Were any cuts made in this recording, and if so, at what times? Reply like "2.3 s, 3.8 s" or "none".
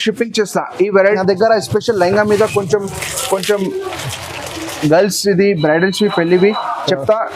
1.0 s